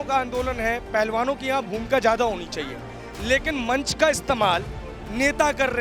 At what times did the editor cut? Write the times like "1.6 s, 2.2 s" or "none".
none